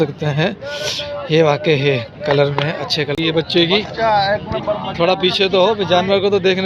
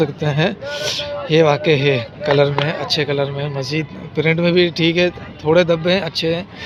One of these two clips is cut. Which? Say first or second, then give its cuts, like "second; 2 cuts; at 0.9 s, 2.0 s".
first; 1 cut; at 3.2 s